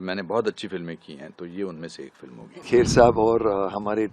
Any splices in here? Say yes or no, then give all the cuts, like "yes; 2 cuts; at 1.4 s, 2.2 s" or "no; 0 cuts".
yes; 1 cut; at 2.6 s